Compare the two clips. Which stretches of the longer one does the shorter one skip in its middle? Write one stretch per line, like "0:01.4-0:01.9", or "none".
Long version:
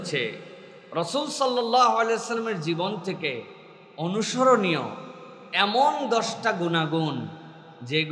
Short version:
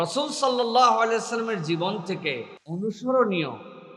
0:03.6-0:03.9